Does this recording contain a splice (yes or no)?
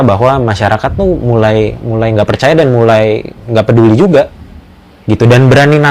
no